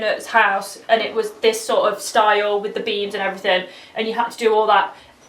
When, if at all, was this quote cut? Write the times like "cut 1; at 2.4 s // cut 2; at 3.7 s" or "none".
none